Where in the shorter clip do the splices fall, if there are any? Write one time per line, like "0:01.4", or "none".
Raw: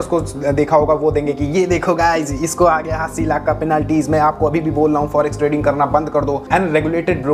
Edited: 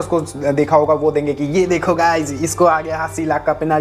none